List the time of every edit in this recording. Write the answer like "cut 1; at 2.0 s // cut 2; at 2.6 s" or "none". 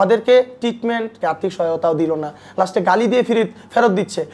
cut 1; at 1.2 s